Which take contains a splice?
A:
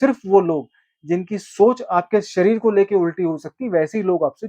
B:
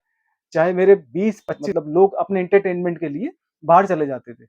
B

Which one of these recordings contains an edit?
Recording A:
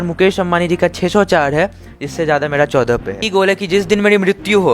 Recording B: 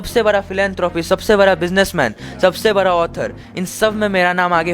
A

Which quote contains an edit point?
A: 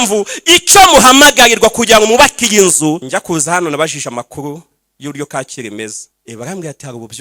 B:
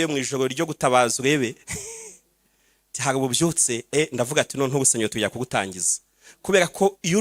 A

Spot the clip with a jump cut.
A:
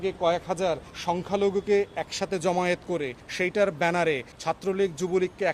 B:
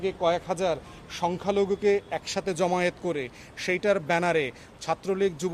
A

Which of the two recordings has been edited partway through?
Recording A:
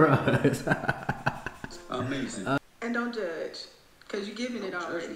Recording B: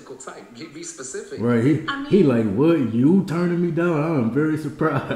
A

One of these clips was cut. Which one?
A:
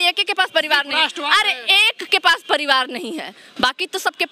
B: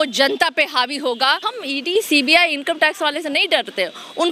B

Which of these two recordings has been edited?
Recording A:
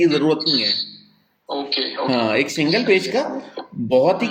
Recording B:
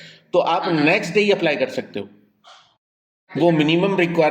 B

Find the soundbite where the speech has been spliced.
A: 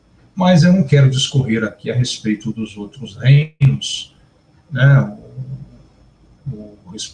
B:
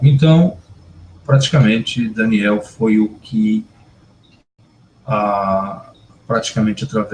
B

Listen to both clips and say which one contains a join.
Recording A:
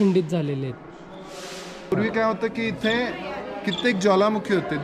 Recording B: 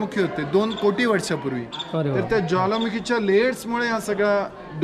A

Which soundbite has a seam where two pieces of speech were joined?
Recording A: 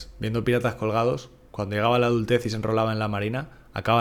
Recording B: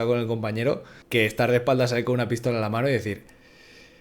B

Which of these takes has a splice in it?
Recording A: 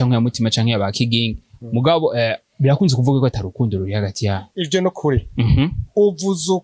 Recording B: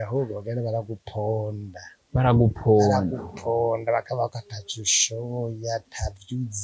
A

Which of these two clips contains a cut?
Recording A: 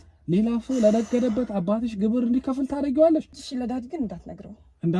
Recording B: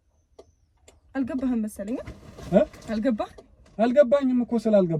A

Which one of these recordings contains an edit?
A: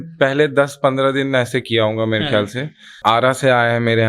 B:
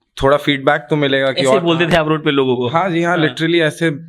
A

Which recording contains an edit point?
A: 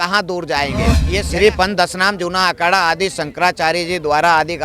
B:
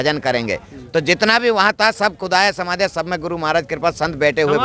A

